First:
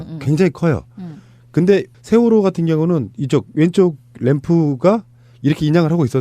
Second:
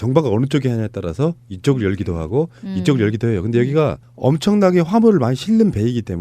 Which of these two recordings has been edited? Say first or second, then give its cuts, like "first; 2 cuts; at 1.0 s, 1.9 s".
second; 1 cut; at 3.7 s